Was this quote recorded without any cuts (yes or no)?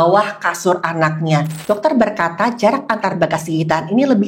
no